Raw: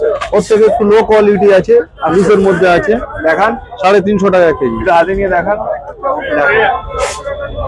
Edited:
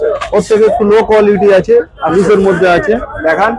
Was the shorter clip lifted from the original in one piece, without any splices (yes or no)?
yes